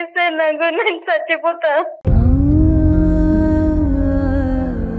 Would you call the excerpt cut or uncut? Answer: uncut